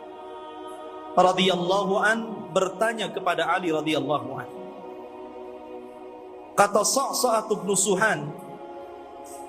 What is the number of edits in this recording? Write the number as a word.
zero